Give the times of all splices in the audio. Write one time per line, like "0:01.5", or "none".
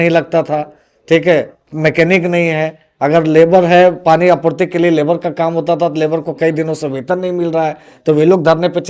none